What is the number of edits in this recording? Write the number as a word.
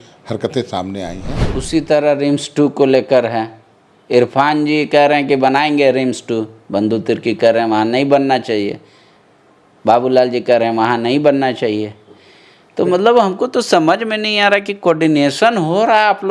one